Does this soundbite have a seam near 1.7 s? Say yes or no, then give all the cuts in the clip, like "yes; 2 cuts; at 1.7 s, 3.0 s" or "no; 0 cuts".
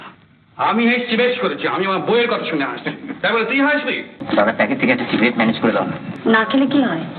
no; 2 cuts; at 4.1 s, 6.1 s